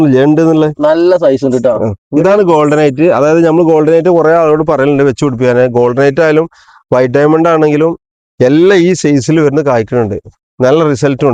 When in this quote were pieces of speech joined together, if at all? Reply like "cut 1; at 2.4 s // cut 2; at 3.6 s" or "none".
none